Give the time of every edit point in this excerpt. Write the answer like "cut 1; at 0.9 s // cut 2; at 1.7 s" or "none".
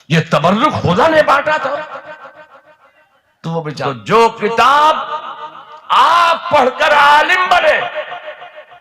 cut 1; at 3.9 s